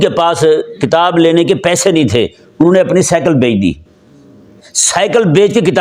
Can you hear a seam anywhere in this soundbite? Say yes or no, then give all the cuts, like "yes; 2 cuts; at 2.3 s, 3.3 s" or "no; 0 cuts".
no; 0 cuts